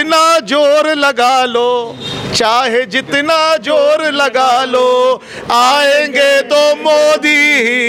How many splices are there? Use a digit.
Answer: 0